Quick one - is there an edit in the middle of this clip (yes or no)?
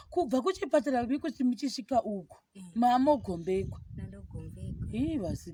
no